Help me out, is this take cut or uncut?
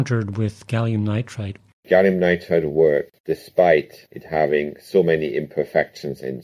cut